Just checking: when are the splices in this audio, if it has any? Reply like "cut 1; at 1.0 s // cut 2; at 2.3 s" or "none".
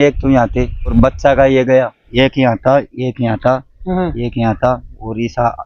cut 1; at 0.9 s // cut 2; at 2.0 s